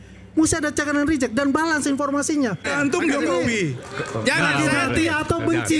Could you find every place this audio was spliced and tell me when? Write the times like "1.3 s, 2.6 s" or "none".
2.7 s